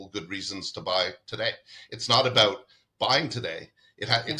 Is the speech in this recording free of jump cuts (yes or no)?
yes